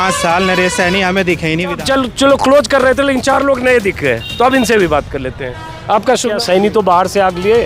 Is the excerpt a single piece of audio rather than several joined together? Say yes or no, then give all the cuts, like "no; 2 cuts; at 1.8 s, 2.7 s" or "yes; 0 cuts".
no; 2 cuts; at 1.8 s, 6.4 s